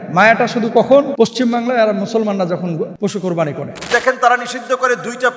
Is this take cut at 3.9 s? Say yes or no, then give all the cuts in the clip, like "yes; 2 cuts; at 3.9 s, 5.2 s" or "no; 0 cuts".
yes; 3 cuts; at 1.1 s, 2.9 s, 3.9 s